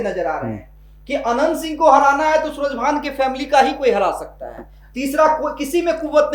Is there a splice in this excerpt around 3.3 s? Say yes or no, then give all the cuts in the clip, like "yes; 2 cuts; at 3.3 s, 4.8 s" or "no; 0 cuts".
no; 0 cuts